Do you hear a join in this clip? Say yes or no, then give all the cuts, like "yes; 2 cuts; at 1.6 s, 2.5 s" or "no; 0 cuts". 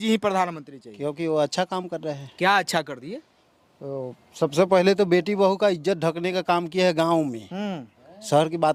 no; 0 cuts